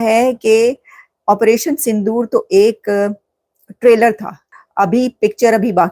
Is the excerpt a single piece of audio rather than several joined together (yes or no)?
no